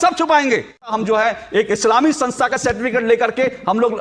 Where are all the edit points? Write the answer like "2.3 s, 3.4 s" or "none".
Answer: 0.9 s